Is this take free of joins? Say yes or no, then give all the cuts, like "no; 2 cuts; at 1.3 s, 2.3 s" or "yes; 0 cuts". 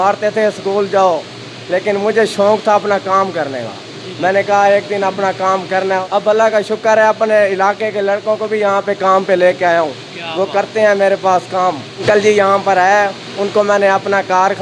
no; 2 cuts; at 6.0 s, 12.0 s